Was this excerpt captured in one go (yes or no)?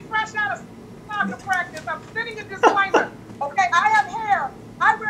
yes